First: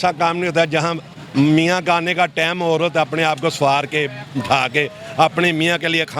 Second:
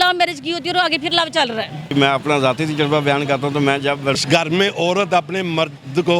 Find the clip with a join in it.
second; 2 cuts; at 1.9 s, 4.2 s

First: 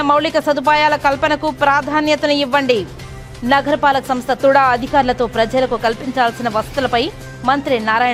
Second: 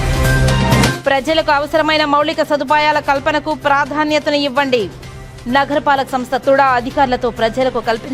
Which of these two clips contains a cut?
second; 1 cut; at 1.0 s

